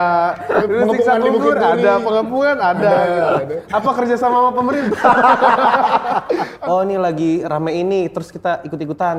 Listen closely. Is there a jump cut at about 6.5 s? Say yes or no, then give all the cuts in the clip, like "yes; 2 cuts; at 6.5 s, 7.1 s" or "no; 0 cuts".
yes; 1 cut; at 6.5 s